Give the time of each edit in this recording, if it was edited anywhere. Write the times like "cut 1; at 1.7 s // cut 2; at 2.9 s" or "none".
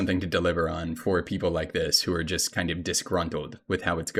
none